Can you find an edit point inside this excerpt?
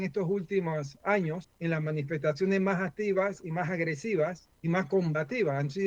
yes; 2 cuts; at 1.5 s, 4.5 s

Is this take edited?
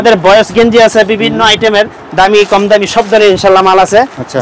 no; 0 cuts

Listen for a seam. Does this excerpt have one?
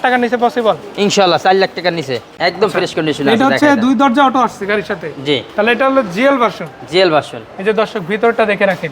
yes; 1 cut; at 2.3 s

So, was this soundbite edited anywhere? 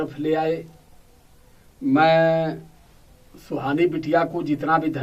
no; 0 cuts

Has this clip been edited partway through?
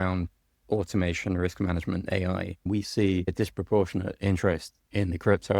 yes; 2 cuts; at 2.6 s, 3.3 s

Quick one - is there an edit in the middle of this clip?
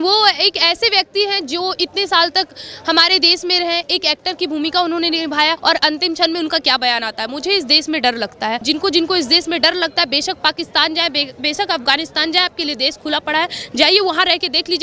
yes; 2 cuts; at 5.6 s, 8.6 s

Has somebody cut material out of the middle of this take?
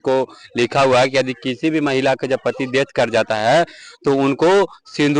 no; 0 cuts

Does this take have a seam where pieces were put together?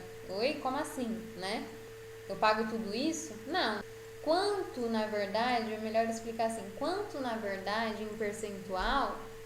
no; 0 cuts

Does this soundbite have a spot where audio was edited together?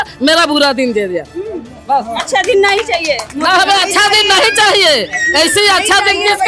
no; 0 cuts

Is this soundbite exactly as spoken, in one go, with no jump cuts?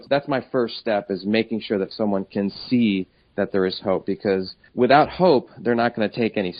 yes; 0 cuts

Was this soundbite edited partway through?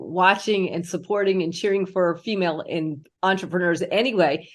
no; 0 cuts

